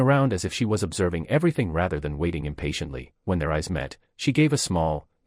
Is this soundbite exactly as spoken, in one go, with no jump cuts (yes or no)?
yes